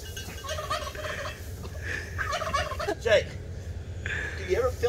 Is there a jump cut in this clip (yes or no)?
yes